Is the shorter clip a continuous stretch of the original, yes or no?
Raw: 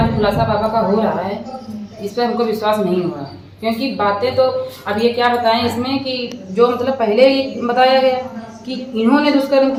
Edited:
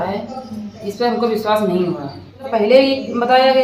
no